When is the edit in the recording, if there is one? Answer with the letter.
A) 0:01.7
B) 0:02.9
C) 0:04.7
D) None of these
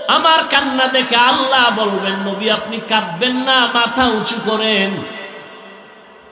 D